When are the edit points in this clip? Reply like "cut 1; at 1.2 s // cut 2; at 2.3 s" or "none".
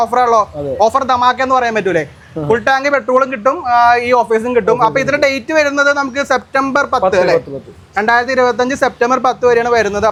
none